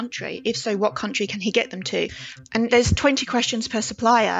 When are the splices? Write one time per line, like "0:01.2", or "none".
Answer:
0:02.7